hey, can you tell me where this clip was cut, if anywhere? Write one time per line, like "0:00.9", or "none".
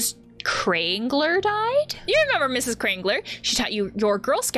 0:02.0

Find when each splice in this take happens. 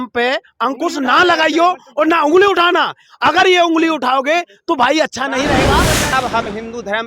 0:06.1

